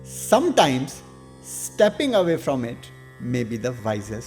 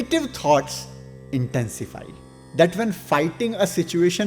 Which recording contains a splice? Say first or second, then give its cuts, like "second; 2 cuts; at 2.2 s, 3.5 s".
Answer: second; 1 cut; at 2.3 s